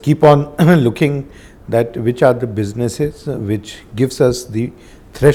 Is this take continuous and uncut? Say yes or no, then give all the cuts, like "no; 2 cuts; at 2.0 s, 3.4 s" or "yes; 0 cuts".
yes; 0 cuts